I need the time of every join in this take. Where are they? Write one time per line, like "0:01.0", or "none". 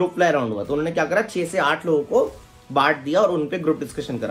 none